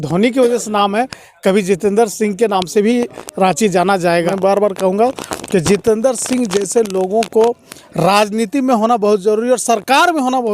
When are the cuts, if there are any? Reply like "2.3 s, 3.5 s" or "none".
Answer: 4.3 s